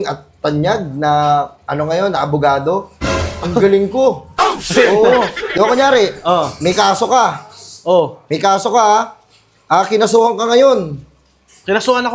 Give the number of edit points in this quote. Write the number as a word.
zero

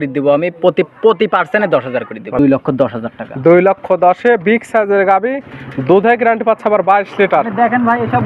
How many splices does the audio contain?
one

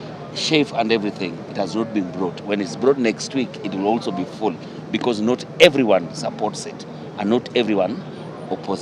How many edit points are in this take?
zero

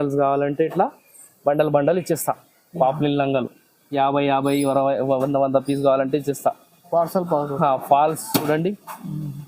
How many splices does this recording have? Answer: zero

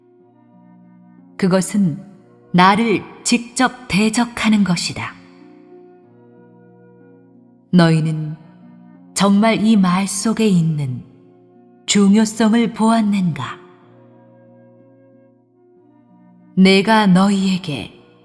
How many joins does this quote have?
one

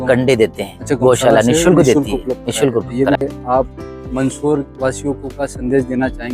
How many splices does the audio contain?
one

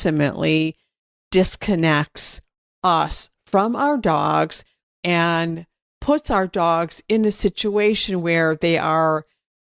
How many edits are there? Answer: zero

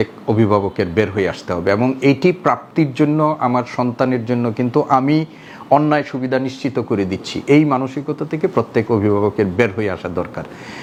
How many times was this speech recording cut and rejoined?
zero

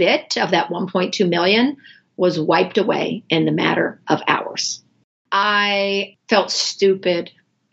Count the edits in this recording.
two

